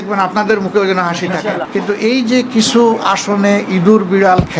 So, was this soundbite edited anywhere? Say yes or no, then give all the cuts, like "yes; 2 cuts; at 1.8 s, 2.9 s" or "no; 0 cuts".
yes; 1 cut; at 1.7 s